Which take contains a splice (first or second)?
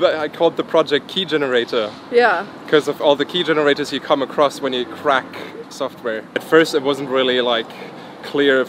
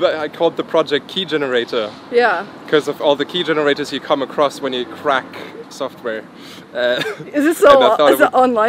first